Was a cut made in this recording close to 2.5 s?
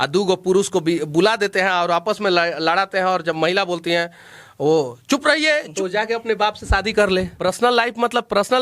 no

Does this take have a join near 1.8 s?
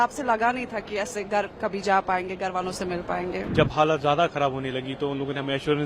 no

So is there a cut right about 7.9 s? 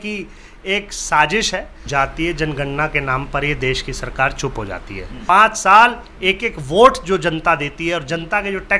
no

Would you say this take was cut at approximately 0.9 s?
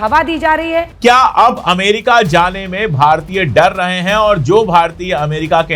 yes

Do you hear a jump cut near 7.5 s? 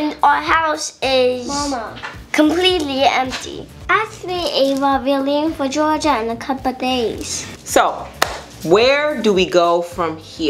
yes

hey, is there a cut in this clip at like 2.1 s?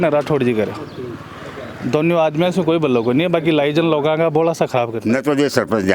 no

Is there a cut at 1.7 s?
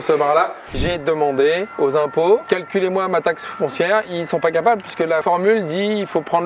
yes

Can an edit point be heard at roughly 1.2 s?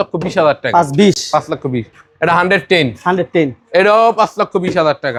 no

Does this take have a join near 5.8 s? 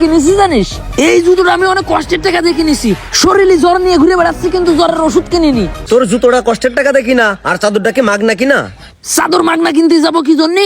yes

